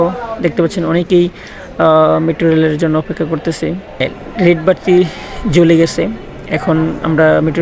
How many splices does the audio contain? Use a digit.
1